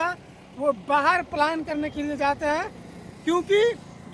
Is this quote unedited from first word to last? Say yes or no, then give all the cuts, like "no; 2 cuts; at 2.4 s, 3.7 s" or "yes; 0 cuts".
yes; 0 cuts